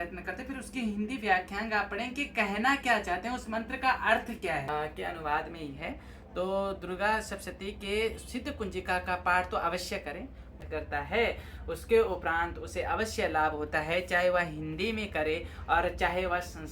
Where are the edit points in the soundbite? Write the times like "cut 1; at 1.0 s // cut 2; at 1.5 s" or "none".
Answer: cut 1; at 4.7 s // cut 2; at 10.6 s